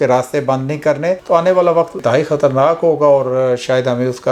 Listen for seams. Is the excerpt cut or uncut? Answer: uncut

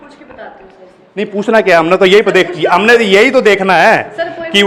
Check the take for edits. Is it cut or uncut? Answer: uncut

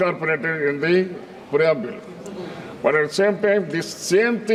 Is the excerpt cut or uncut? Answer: uncut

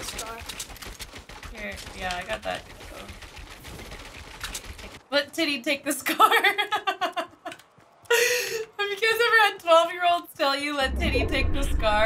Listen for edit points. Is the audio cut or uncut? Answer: cut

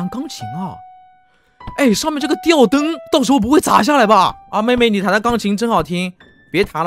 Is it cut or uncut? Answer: cut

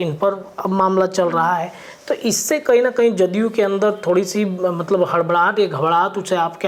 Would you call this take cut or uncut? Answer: uncut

